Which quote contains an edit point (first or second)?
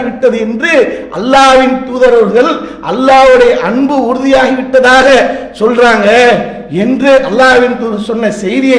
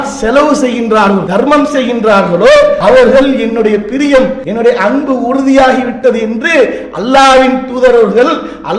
second